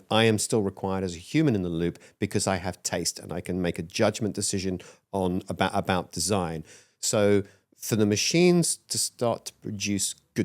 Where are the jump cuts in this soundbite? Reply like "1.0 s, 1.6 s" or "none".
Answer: none